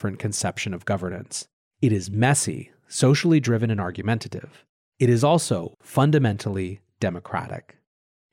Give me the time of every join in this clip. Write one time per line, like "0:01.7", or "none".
none